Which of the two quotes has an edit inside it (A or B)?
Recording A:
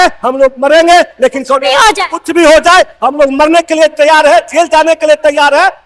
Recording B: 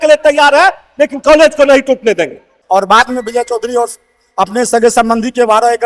B